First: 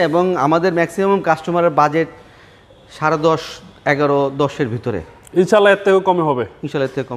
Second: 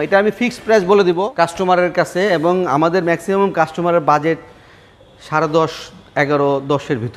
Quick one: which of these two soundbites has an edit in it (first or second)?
second